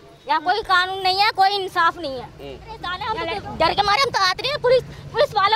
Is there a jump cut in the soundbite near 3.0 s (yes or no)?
yes